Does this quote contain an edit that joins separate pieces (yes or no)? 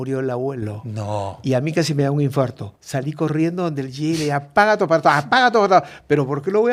no